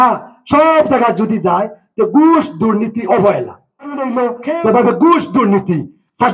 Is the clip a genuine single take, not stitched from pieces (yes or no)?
no